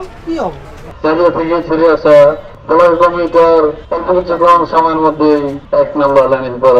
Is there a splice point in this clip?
yes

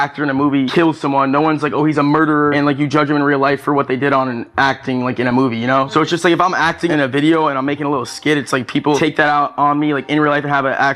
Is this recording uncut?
yes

